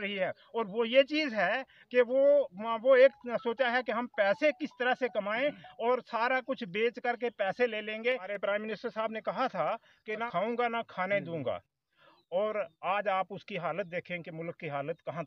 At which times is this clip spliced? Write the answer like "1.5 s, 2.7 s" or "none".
8.2 s, 10.3 s